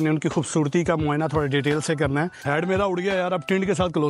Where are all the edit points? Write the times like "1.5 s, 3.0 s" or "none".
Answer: 2.4 s